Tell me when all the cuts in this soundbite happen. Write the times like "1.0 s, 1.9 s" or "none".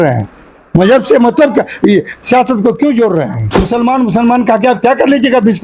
3.5 s